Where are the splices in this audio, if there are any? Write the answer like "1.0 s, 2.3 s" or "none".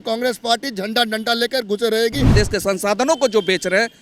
2.3 s